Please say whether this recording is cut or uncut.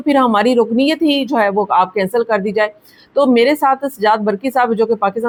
uncut